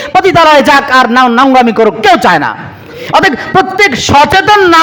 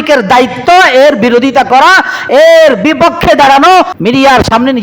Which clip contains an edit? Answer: second; 1 cut; at 3.9 s

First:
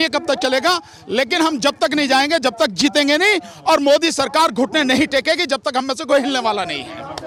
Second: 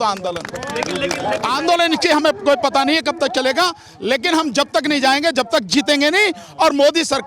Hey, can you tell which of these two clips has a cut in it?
second; 1 cut; at 1.4 s

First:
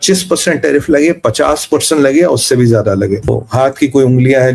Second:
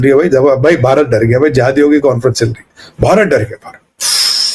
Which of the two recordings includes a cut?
first; 1 cut; at 3.3 s

